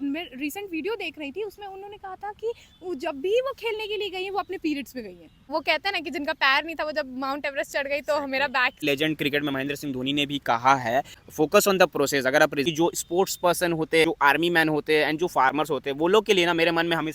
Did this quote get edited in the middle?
yes; 5 cuts; at 5.5 s, 8.8 s, 11.2 s, 12.6 s, 14.0 s

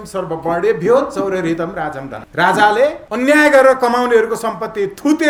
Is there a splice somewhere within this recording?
no; 0 cuts

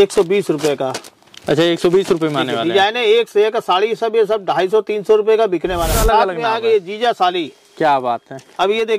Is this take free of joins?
no; 1 cut; at 5.9 s

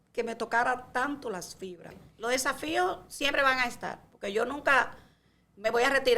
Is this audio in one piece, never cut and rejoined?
no; 1 cut; at 2.0 s

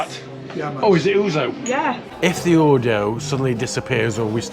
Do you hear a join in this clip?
yes; 1 cut; at 2.1 s

